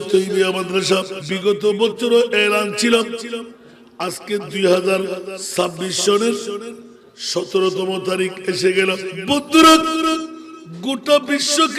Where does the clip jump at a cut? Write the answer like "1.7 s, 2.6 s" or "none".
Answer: 1.2 s, 5.3 s, 9.1 s